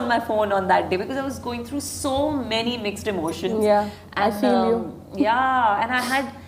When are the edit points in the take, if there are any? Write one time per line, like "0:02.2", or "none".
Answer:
none